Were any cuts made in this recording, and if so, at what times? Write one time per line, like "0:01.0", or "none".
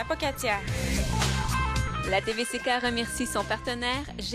none